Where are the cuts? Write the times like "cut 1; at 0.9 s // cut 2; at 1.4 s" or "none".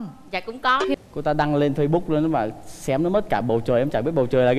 cut 1; at 1.0 s